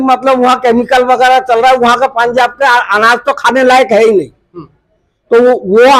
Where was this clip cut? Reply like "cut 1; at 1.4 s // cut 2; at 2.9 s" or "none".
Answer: none